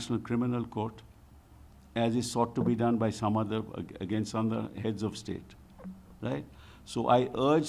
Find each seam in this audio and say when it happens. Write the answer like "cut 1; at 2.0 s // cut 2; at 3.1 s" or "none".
none